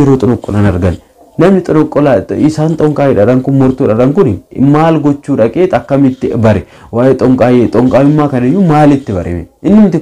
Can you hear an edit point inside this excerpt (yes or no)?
no